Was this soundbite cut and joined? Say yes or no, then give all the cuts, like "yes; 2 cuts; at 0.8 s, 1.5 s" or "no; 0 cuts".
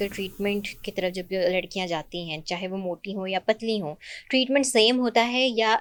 no; 0 cuts